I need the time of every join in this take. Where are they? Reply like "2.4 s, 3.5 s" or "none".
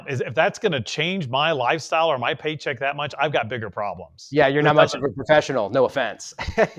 none